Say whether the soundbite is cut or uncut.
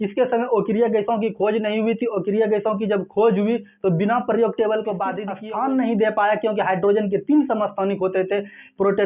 cut